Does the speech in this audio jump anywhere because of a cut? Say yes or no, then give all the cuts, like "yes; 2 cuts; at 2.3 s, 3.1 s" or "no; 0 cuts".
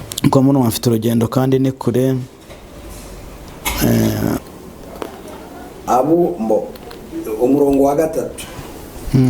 yes; 1 cut; at 4.4 s